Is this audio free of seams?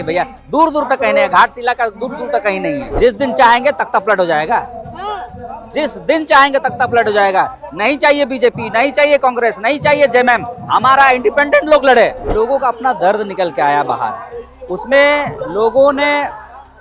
no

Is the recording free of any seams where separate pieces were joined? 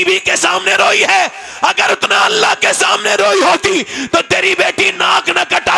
yes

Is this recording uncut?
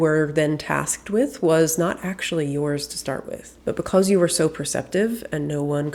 yes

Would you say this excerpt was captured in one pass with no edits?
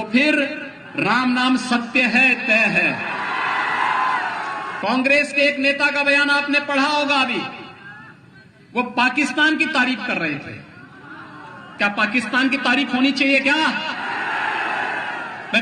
no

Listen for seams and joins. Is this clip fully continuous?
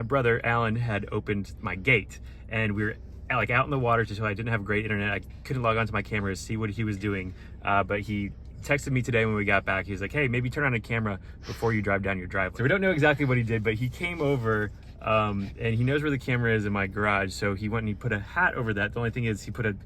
no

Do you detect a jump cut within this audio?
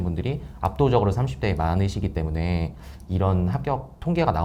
no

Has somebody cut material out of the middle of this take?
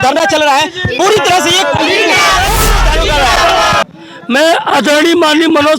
yes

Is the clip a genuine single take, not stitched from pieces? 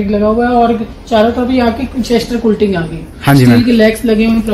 yes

